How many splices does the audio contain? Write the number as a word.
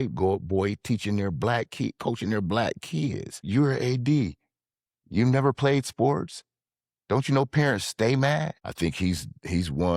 two